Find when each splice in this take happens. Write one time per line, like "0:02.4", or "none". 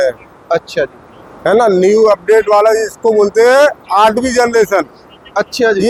none